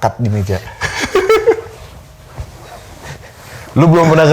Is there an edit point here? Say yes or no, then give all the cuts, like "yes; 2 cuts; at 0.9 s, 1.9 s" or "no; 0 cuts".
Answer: no; 0 cuts